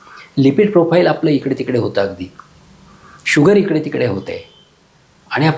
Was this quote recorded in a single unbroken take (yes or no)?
yes